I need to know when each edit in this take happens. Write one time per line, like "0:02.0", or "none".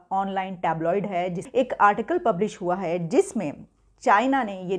0:01.4